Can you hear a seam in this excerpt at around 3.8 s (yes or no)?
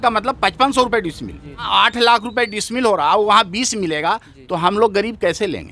no